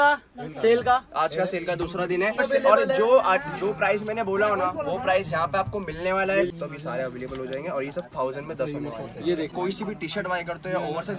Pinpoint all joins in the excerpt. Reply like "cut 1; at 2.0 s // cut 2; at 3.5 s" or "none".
cut 1; at 2.4 s // cut 2; at 6.5 s // cut 3; at 9.5 s